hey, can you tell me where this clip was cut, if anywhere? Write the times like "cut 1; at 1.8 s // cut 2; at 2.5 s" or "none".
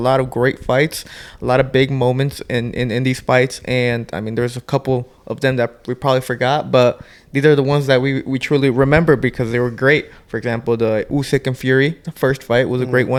none

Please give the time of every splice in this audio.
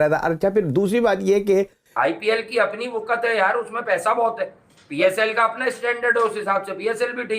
cut 1; at 1.8 s

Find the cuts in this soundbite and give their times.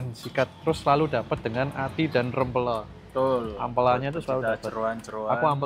none

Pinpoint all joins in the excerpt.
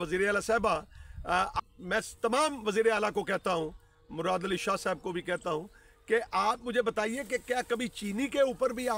none

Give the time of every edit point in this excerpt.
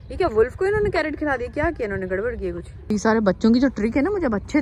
cut 1; at 2.7 s

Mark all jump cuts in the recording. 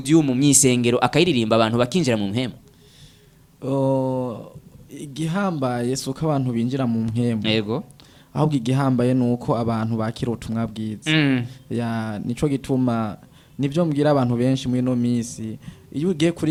none

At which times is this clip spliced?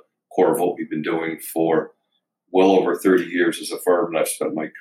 none

